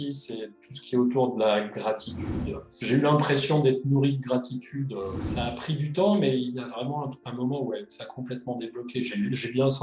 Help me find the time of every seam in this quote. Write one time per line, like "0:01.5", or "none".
0:02.7
0:05.2